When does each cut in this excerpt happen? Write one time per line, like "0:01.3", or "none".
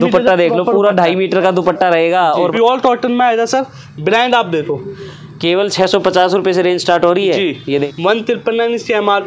0:02.4
0:07.9